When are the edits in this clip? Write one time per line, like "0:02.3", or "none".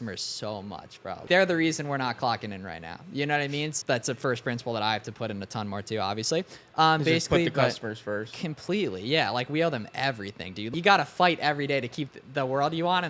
0:01.3
0:03.8
0:10.7